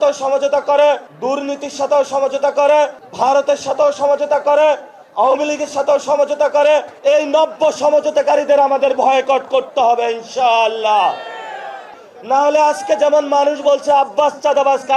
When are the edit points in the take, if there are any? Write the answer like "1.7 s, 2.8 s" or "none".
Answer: 11.9 s

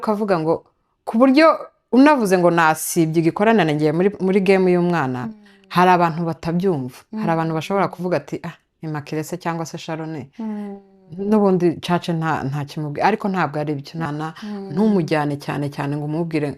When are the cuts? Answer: 14.1 s

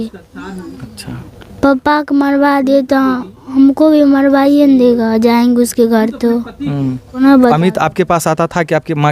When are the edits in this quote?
7.2 s

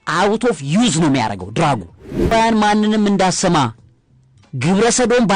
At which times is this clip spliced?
2.3 s

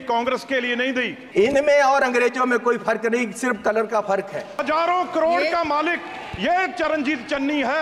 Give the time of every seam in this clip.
1.2 s, 4.6 s

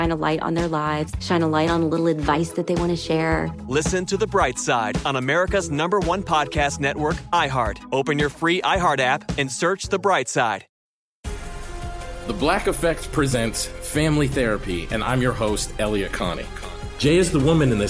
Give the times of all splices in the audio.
10.8 s

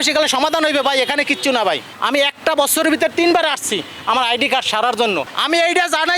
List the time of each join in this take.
1.9 s, 5.3 s

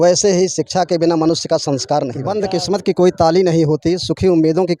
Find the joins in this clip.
2.2 s

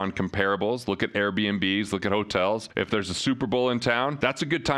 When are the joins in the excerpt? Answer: none

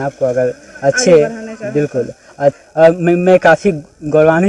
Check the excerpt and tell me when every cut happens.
2.5 s

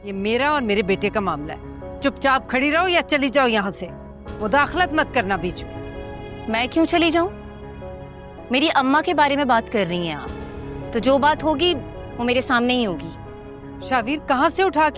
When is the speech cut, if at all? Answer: none

